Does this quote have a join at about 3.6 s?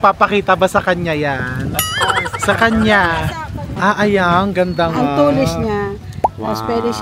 yes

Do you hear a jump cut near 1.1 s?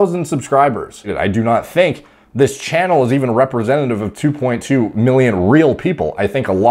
yes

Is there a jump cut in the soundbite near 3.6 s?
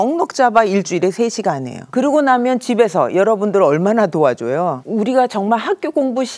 no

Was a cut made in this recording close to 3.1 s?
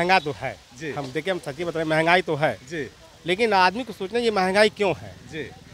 no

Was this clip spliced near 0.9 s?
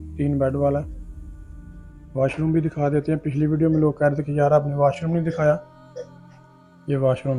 no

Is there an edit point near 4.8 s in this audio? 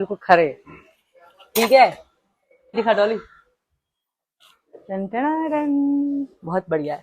no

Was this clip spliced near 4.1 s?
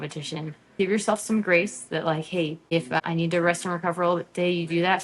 no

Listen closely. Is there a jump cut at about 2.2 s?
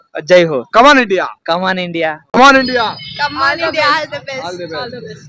yes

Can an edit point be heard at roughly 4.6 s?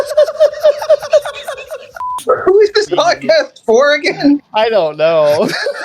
no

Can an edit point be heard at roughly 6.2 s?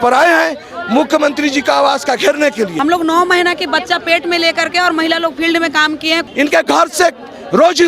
yes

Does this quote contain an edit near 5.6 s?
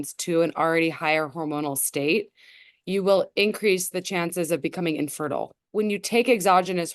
yes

